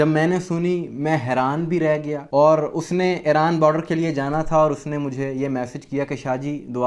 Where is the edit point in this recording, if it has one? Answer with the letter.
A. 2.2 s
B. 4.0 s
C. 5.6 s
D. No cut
A